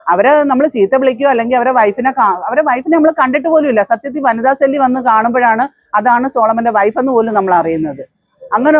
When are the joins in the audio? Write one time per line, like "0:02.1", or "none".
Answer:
none